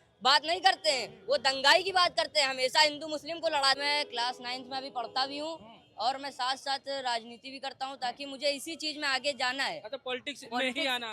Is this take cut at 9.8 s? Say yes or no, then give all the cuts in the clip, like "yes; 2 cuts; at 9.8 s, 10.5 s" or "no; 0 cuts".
no; 1 cut; at 3.8 s